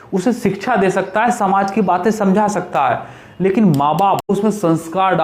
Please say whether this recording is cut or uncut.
cut